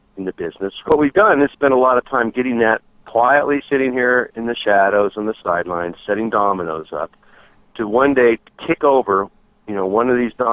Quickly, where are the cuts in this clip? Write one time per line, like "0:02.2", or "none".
0:00.9
0:02.9